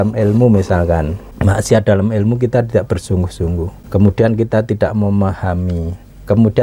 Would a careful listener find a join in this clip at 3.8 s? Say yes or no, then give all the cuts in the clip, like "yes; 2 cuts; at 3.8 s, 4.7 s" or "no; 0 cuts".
yes; 2 cuts; at 1.2 s, 3.8 s